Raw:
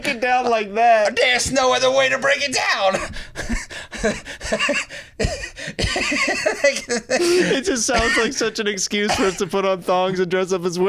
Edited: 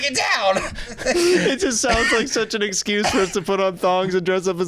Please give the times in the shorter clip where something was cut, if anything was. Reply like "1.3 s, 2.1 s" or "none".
0.9 s